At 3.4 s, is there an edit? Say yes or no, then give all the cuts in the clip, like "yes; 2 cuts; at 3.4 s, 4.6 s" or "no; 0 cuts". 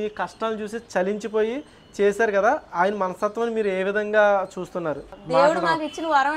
no; 1 cut; at 5.1 s